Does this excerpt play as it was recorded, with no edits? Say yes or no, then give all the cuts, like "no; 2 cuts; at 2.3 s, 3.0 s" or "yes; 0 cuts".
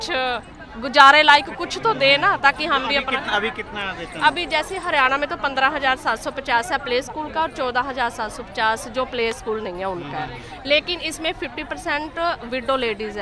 yes; 0 cuts